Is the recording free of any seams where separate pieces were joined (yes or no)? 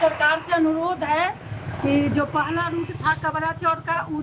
yes